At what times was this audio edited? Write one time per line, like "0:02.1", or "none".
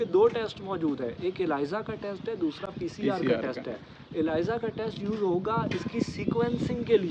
none